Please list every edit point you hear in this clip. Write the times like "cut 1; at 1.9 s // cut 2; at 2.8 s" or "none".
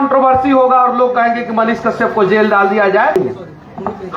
cut 1; at 3.2 s